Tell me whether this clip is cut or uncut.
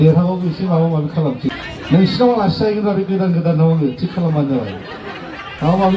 cut